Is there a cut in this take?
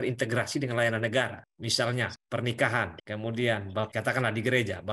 no; 0 cuts

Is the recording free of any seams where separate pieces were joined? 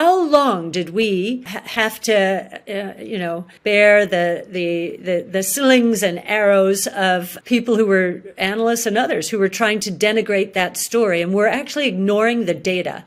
yes; 0 cuts

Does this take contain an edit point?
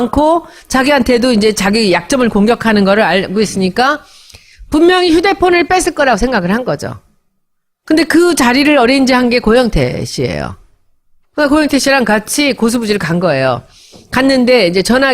yes; 1 cut; at 6.2 s

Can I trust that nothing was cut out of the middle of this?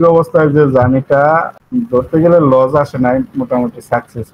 no; 1 cut; at 1.6 s

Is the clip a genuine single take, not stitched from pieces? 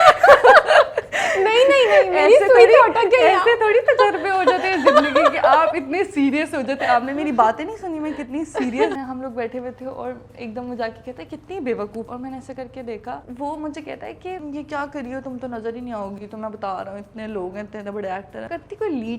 no; 5 cuts; at 8.9 s, 12.1 s, 13.3 s, 14.4 s, 18.5 s

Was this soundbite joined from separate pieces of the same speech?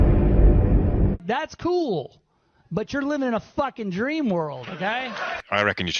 yes; 1 cut; at 1.1 s

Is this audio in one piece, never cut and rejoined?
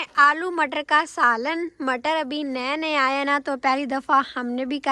yes; 0 cuts

